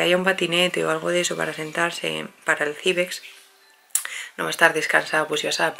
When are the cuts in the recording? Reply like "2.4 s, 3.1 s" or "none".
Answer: none